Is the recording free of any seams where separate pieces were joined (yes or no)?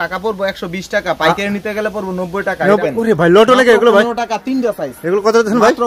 no